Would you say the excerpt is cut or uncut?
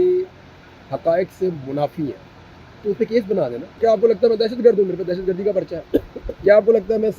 cut